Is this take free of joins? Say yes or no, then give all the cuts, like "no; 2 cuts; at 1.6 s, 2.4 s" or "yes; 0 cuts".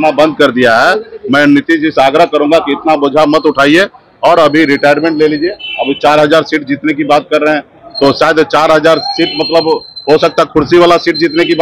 yes; 0 cuts